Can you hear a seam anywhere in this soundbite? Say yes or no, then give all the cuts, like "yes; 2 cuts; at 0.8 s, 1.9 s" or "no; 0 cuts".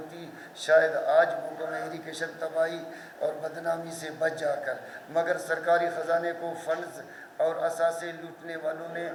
no; 0 cuts